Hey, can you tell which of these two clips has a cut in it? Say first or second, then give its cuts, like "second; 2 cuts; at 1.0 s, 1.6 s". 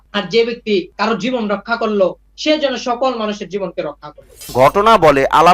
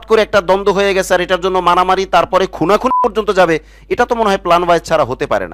first; 2 cuts; at 2.3 s, 4.5 s